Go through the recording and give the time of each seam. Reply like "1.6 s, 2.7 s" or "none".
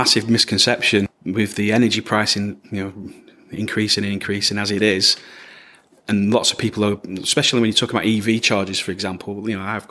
1.1 s